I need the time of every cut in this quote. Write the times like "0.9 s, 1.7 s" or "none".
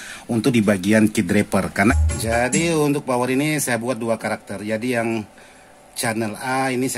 1.7 s